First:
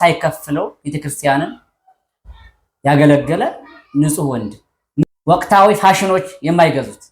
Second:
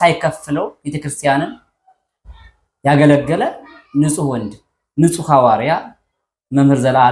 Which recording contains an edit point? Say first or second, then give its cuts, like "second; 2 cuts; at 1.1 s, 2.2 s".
first; 1 cut; at 5.0 s